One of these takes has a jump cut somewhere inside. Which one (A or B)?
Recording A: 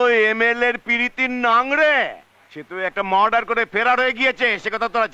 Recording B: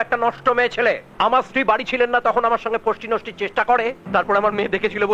B